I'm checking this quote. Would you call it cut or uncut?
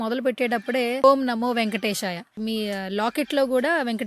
cut